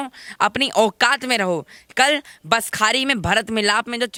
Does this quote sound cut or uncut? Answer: uncut